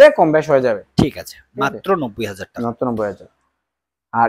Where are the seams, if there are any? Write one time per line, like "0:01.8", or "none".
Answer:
none